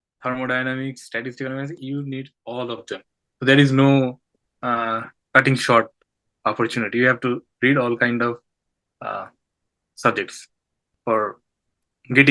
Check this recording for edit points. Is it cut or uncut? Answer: uncut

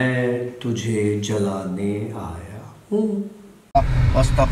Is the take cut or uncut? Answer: cut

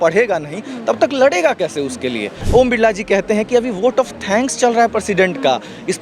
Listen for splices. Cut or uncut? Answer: cut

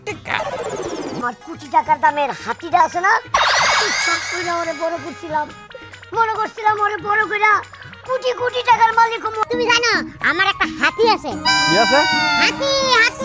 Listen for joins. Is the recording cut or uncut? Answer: cut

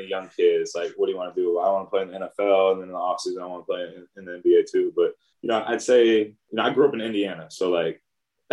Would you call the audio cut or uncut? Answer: cut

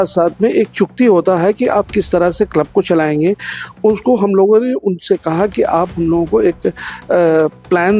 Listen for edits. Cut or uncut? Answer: uncut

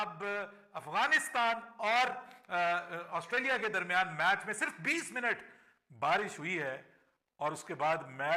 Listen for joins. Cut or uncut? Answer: uncut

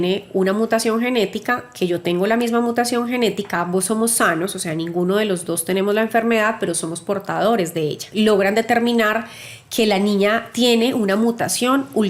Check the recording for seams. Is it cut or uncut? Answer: cut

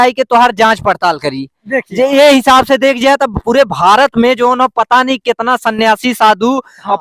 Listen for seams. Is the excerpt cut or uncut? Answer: uncut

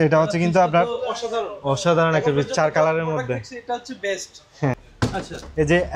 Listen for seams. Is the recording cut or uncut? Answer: cut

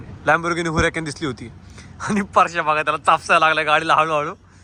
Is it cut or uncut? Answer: uncut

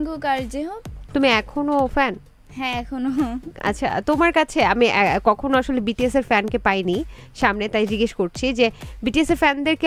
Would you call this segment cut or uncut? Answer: uncut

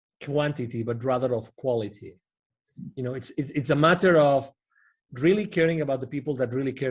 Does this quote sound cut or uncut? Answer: uncut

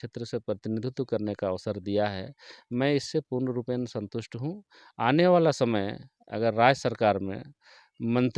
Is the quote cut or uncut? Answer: uncut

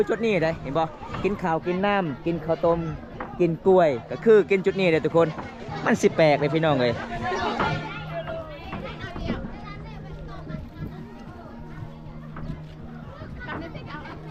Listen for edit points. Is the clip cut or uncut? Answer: uncut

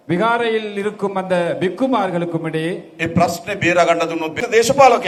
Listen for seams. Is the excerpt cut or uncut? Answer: uncut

